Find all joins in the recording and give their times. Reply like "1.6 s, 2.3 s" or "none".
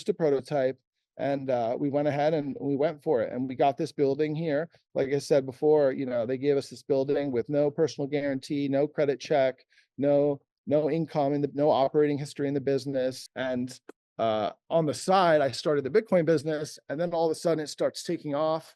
13.3 s